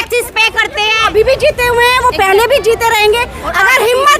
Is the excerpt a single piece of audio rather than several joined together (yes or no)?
no